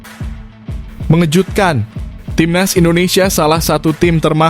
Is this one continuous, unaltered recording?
no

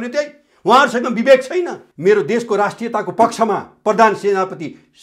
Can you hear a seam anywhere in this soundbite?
yes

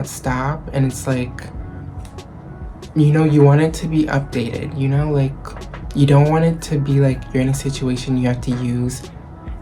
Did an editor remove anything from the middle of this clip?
no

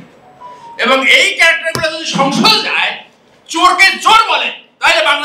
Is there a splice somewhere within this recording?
no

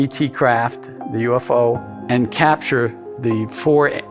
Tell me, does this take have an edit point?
yes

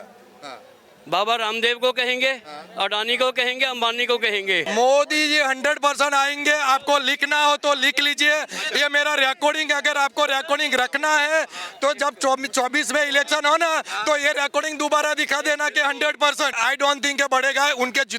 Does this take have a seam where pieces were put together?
yes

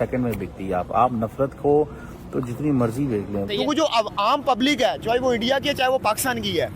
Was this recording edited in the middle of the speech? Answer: yes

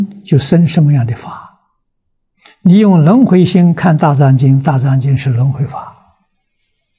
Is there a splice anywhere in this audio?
no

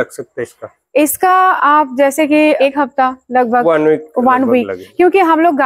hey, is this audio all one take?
no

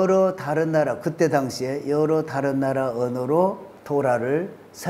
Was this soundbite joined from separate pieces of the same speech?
yes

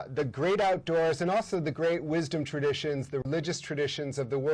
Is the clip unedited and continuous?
no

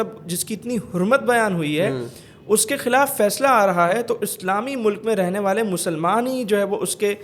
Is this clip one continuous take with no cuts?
yes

